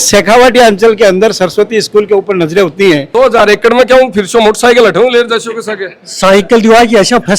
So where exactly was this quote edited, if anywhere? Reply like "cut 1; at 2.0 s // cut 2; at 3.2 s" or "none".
cut 1; at 3.1 s